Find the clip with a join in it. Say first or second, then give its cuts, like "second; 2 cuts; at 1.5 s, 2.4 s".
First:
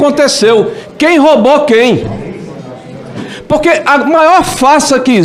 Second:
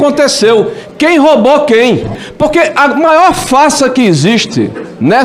second; 1 cut; at 2.2 s